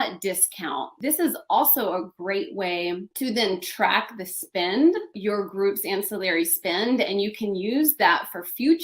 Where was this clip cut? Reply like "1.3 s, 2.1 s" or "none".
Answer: 0.9 s

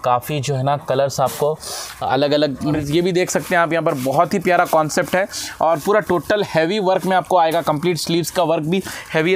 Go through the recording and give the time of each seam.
2.8 s

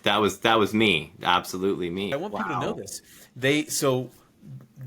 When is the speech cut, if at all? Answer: 2.1 s

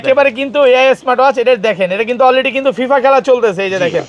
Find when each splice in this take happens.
none

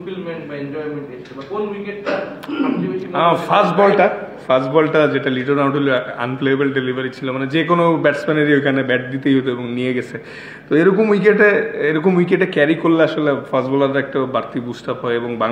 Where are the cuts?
none

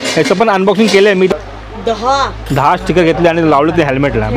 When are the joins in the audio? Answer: 1.3 s

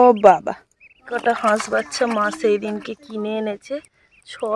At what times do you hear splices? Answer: 1.1 s

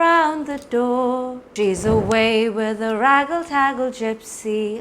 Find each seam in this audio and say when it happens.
1.4 s

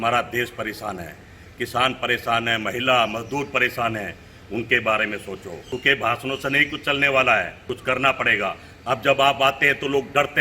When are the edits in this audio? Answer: 5.7 s, 7.6 s

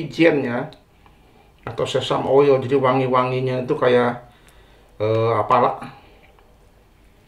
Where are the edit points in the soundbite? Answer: none

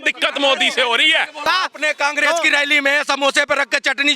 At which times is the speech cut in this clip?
1.4 s

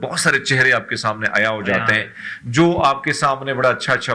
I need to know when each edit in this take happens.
none

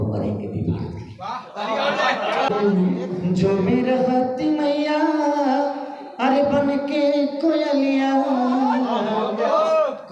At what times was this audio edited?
2.5 s

